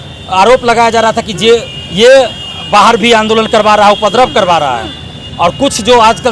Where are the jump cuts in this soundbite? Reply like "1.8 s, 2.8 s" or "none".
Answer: none

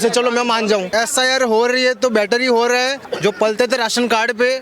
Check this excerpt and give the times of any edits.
0.9 s, 3.0 s

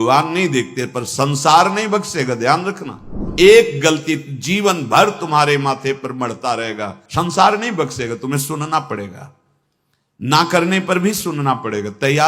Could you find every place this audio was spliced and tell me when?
3.2 s

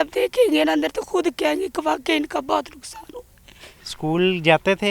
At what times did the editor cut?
3.8 s

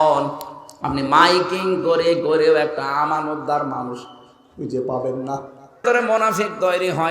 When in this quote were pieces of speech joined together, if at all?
5.8 s

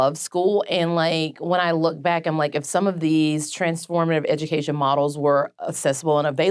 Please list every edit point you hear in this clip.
none

